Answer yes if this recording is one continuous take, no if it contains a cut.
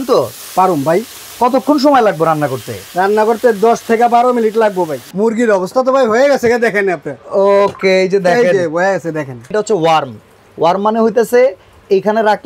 no